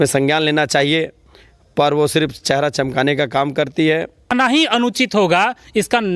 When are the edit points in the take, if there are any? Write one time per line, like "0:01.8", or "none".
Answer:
0:04.6